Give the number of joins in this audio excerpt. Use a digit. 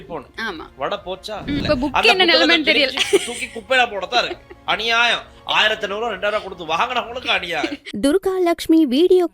2